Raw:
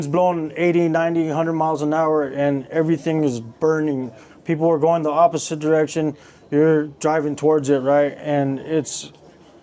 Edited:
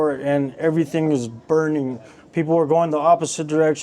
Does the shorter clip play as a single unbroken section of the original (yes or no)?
yes